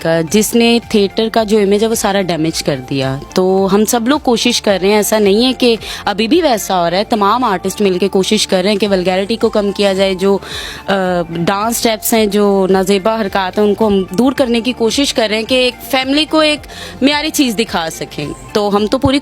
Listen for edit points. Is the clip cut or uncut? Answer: uncut